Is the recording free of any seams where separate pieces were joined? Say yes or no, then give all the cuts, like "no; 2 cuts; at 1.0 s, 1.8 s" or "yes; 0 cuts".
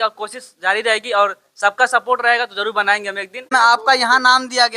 no; 1 cut; at 3.5 s